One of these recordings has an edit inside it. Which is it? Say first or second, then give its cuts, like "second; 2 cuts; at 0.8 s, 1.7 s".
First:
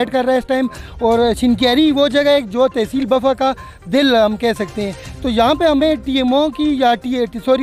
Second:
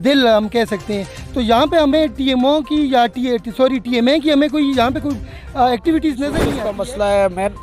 second; 1 cut; at 6.5 s